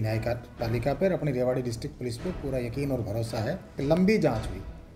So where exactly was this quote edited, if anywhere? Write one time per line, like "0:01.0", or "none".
0:03.8